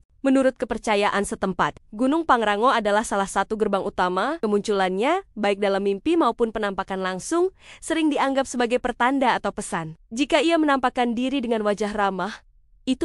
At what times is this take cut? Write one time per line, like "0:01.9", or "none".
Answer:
0:04.4

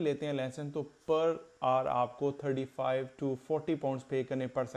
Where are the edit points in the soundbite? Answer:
none

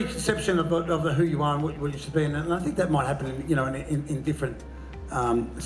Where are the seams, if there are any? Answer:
none

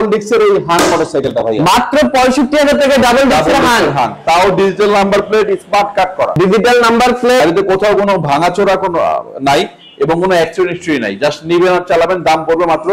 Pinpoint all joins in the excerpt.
none

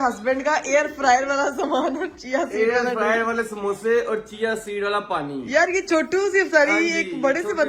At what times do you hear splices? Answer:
none

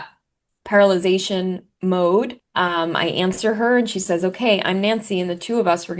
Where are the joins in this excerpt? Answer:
0:02.4

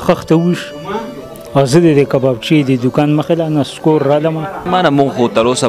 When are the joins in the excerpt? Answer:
0:04.7

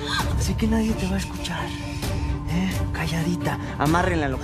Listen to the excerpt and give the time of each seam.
none

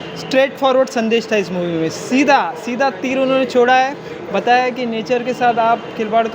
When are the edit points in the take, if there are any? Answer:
none

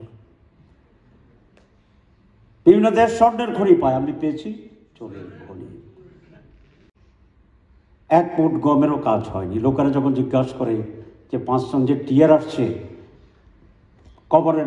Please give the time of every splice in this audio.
0:06.9

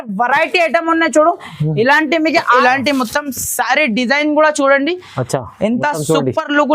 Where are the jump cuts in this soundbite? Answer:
0:02.6

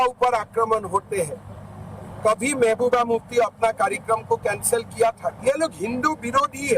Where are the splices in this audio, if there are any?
0:05.4

